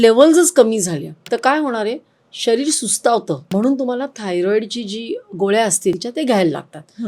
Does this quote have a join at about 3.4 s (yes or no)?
yes